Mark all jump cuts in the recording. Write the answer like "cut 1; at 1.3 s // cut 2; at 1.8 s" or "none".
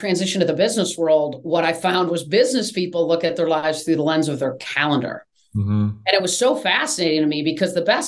none